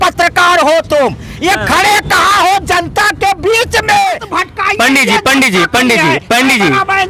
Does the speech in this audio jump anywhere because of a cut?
yes; 1 cut; at 4.3 s

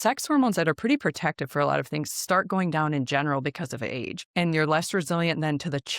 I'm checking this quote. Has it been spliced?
yes; 1 cut; at 4.2 s

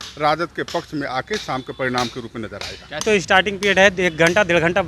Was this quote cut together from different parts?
yes; 1 cut; at 3.0 s

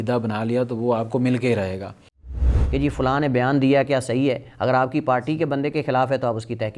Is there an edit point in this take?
yes; 1 cut; at 2.5 s

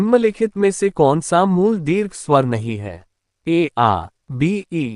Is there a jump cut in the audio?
yes; 1 cut; at 0.9 s

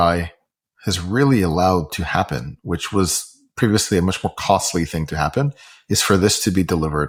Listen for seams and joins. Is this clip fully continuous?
yes; 0 cuts

